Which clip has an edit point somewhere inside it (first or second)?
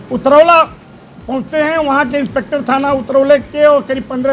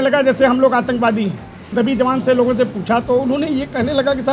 second